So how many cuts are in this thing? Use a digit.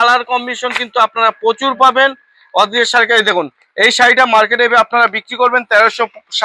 0